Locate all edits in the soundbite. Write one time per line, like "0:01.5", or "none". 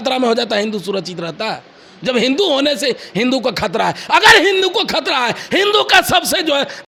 none